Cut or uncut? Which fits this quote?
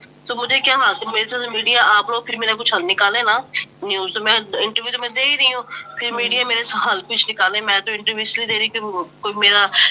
uncut